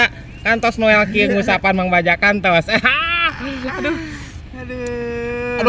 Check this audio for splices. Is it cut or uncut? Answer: uncut